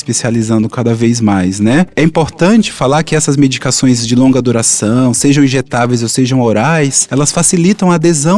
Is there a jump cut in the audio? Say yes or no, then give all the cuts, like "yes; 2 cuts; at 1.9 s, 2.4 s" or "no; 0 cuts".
yes; 1 cut; at 7.0 s